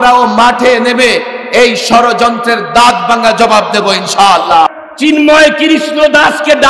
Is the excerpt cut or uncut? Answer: cut